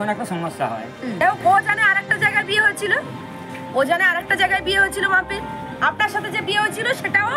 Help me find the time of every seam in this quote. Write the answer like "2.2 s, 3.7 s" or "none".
1.2 s